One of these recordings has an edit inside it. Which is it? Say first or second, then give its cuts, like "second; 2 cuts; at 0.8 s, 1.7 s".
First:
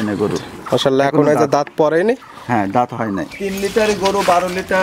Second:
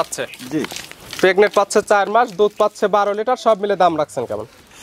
first; 1 cut; at 3.3 s